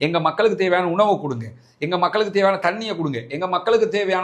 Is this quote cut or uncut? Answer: uncut